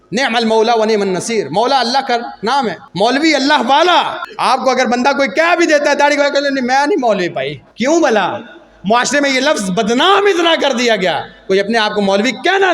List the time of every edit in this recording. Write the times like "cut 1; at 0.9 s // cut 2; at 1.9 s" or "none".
cut 1; at 2.8 s // cut 2; at 4.2 s // cut 3; at 7.6 s